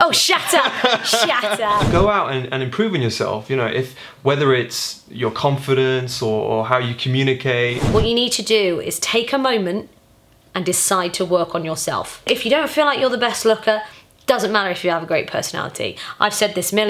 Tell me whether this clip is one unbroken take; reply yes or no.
no